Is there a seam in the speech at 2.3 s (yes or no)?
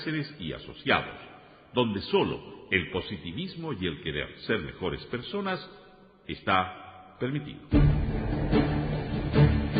no